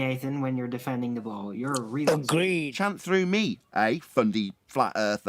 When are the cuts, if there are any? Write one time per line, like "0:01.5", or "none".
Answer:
0:02.7